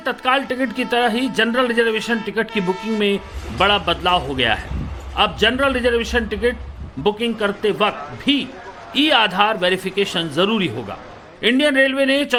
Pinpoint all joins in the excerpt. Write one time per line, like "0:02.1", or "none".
none